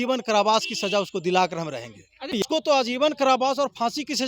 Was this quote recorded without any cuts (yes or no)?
no